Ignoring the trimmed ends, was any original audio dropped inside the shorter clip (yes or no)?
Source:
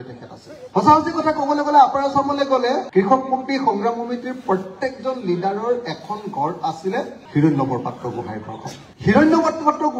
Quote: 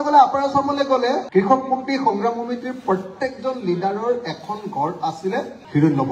no